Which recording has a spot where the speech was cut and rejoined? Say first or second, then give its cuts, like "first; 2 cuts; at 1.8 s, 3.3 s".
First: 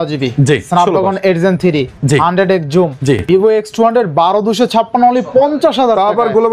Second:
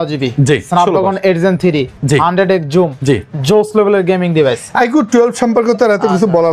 first; 1 cut; at 3.2 s